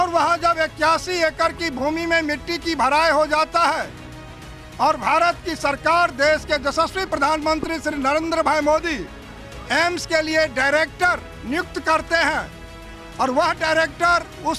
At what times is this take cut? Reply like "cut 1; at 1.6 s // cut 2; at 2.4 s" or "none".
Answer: none